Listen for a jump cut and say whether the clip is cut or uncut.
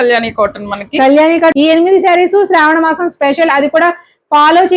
cut